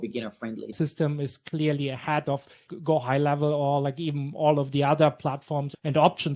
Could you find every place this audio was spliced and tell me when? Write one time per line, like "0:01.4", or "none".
0:00.7
0:02.7